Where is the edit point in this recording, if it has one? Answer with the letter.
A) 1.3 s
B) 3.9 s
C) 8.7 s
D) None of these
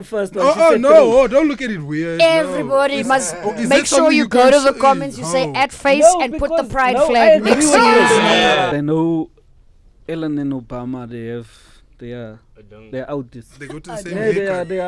C